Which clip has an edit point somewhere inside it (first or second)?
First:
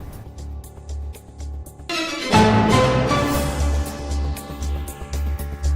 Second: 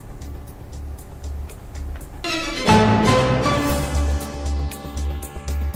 first